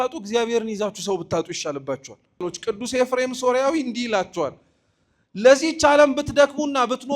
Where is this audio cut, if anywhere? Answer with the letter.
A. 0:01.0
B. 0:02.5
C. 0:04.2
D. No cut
B